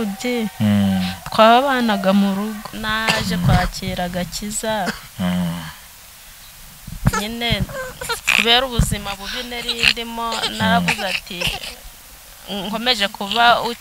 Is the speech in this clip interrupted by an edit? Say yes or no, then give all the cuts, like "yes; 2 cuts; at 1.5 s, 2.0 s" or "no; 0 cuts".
yes; 1 cut; at 2.7 s